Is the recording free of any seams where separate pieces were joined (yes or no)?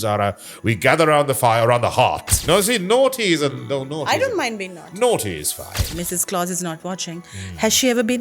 no